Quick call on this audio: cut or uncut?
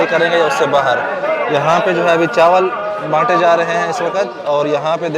uncut